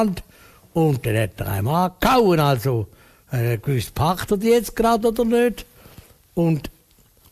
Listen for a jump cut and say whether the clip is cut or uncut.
uncut